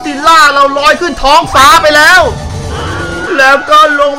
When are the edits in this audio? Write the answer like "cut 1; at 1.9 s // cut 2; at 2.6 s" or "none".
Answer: cut 1; at 3.2 s

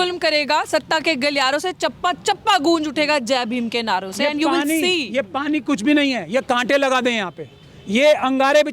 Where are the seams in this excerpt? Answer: none

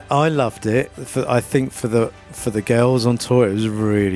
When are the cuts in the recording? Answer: cut 1; at 1.0 s

